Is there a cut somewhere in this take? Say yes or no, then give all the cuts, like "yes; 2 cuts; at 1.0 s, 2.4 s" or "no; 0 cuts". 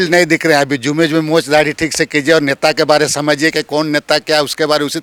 no; 0 cuts